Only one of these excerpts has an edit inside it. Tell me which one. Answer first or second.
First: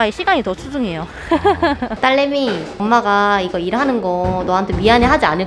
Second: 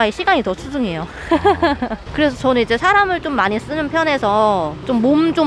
first